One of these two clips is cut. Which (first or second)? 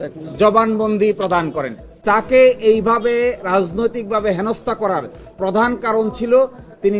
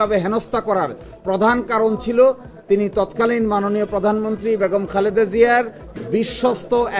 first